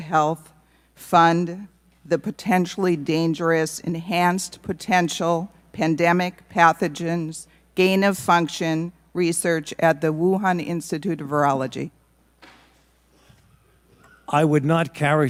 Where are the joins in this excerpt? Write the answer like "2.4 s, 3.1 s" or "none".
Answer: none